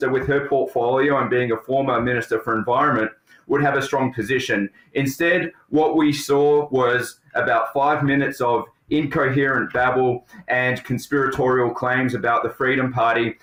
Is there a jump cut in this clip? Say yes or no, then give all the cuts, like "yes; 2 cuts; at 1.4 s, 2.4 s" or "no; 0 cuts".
no; 0 cuts